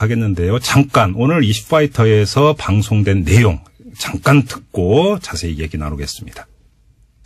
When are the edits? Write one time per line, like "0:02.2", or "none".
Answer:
0:04.9